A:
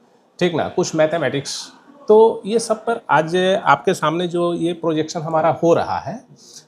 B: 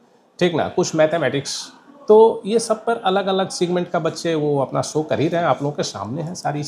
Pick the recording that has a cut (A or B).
A